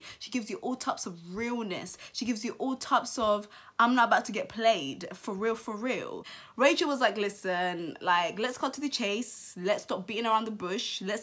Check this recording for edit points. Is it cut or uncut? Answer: uncut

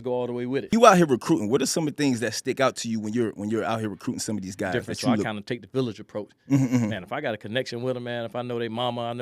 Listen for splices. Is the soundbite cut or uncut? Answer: cut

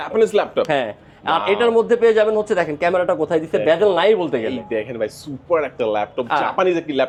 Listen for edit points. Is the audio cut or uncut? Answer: uncut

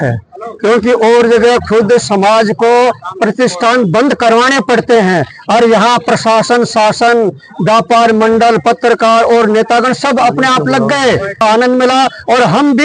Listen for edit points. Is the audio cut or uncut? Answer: cut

